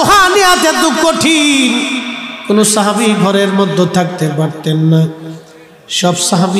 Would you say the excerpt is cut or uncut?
uncut